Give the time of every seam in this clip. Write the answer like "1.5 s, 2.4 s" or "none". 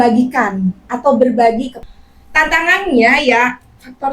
1.8 s